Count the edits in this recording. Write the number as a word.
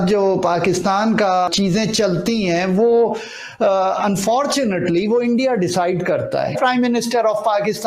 two